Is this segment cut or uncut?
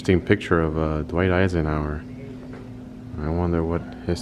uncut